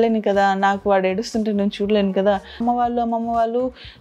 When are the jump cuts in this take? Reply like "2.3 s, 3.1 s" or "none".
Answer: 2.6 s